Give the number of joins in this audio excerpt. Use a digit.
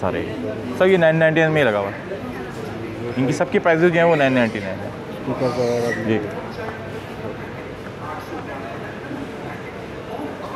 0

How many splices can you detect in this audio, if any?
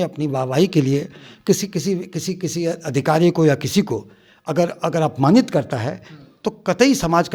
0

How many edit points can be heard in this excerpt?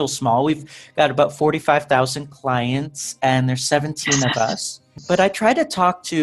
1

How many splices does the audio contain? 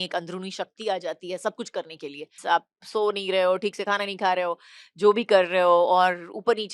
1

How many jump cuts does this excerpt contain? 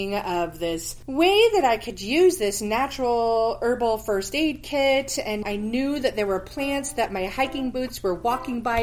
1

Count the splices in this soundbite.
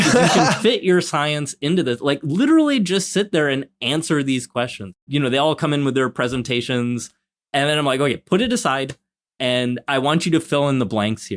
1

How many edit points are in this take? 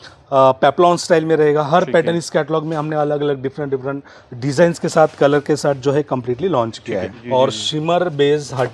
1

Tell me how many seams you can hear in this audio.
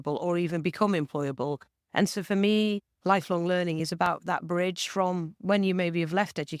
2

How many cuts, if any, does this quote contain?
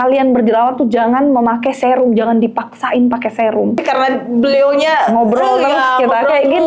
1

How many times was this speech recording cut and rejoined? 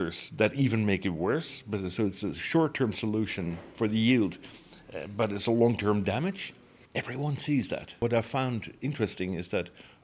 1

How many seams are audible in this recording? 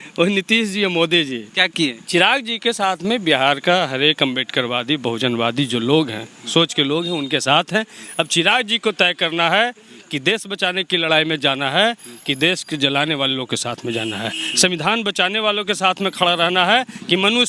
1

